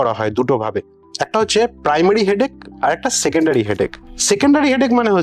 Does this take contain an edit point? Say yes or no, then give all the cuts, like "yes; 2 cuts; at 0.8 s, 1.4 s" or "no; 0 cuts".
no; 0 cuts